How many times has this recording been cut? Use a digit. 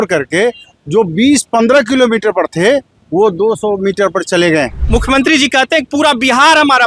1